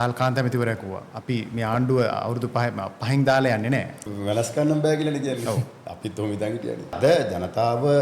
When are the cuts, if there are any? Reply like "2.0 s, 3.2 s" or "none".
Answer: 4.0 s, 7.0 s

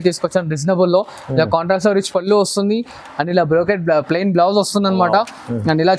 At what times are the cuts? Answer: none

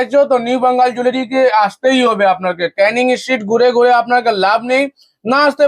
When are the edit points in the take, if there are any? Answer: none

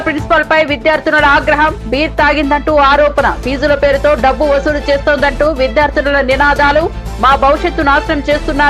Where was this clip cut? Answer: none

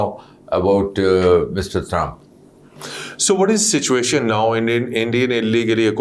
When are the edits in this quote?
none

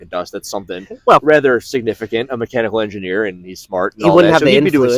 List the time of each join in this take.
none

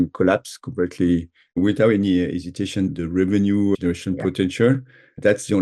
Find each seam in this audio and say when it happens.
1.4 s

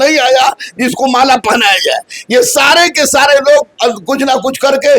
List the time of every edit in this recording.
none

